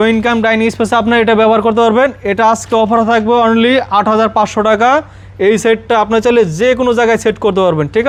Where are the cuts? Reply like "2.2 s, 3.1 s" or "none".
none